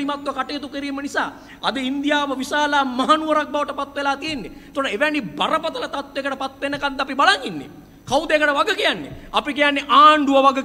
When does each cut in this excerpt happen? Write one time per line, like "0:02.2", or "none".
none